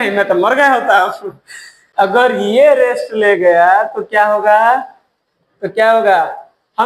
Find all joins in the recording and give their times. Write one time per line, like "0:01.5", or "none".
0:01.8